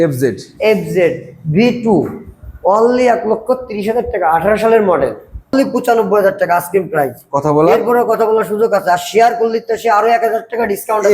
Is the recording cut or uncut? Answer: cut